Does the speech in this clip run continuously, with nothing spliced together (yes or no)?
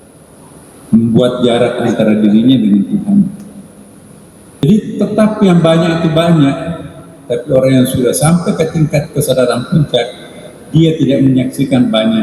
no